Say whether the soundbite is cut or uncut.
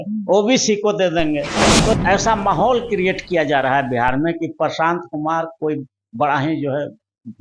cut